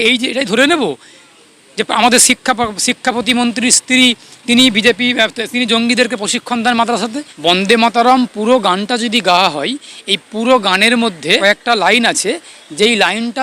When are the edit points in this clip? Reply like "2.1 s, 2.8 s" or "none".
7.3 s, 11.4 s